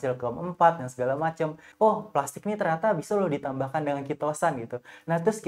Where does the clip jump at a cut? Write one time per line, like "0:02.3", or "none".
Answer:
0:01.6